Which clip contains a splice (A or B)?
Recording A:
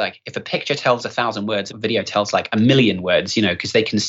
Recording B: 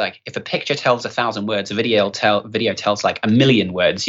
A